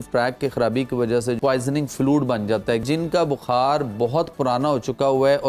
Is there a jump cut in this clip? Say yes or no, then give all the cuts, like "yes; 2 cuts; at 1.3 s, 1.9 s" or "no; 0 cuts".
yes; 2 cuts; at 1.4 s, 2.8 s